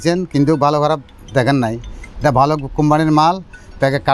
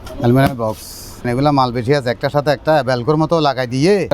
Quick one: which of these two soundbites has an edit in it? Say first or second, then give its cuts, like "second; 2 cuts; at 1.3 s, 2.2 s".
second; 1 cut; at 1.2 s